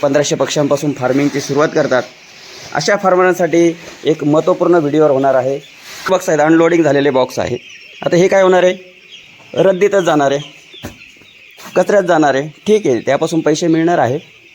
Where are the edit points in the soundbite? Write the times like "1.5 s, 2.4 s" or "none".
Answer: 6.1 s